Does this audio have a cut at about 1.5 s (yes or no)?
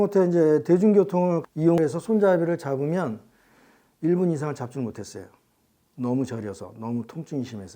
yes